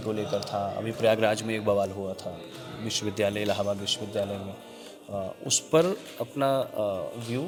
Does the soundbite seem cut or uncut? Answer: uncut